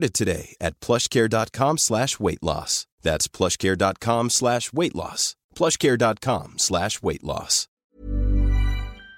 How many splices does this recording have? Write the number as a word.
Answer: one